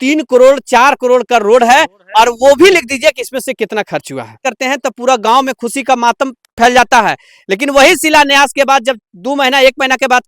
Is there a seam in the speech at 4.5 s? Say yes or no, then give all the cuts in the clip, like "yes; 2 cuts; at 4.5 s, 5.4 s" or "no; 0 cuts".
yes; 1 cut; at 4.5 s